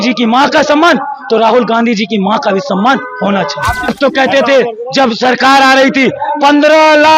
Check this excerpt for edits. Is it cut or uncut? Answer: cut